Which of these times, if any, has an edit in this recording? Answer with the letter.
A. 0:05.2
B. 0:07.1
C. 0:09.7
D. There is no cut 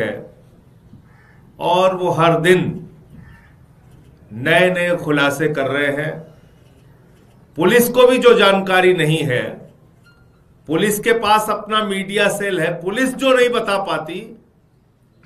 D